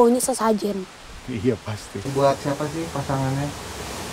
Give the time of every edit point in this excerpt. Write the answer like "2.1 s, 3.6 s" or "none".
2.1 s